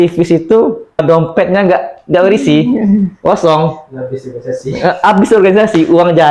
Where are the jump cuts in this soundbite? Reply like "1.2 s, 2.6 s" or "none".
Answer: 1.0 s